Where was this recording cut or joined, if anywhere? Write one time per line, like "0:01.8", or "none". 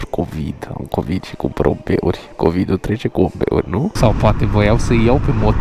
0:03.9